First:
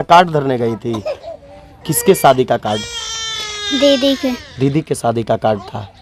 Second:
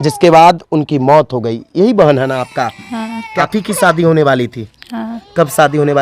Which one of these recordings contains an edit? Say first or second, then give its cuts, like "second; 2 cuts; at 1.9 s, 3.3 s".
second; 1 cut; at 3.4 s